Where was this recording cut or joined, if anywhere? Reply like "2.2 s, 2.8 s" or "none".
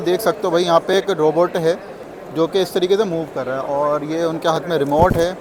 none